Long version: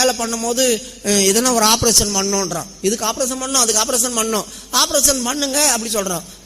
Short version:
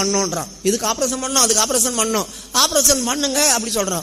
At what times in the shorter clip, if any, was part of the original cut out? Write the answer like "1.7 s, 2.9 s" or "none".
none